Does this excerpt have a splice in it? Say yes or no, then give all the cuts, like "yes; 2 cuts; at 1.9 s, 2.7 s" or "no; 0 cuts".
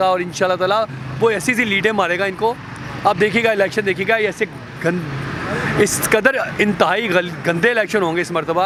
no; 0 cuts